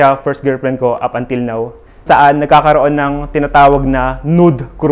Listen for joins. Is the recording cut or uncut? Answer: cut